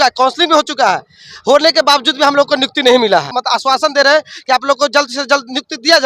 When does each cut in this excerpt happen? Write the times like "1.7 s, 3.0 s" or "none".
3.3 s